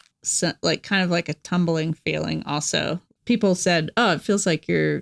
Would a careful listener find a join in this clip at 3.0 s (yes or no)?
yes